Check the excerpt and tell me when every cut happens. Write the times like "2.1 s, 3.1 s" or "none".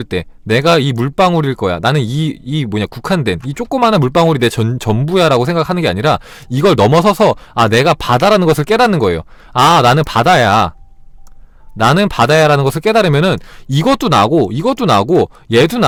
none